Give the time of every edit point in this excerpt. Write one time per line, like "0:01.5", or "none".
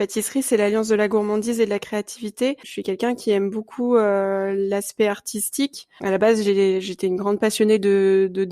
0:02.7
0:05.9